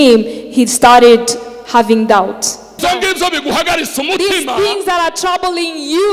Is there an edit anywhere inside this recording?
yes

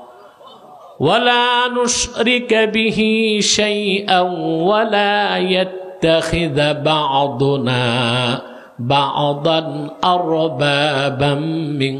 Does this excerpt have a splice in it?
no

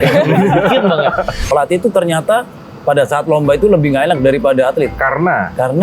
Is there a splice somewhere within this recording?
yes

